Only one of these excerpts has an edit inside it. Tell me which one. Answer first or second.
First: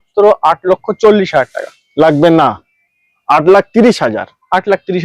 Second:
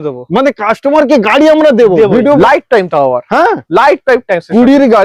second